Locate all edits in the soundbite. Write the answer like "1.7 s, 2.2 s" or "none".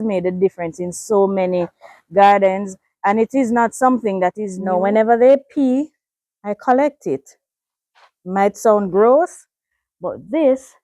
4.5 s